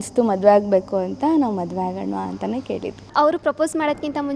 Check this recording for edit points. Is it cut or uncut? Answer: cut